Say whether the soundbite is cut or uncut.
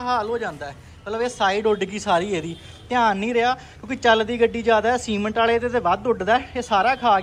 uncut